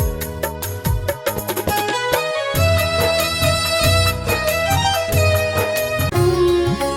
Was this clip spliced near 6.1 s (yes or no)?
yes